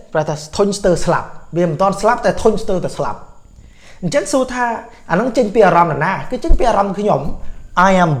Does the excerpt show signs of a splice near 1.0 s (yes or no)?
no